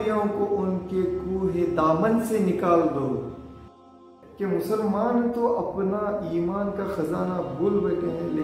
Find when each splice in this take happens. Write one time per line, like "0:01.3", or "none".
0:03.9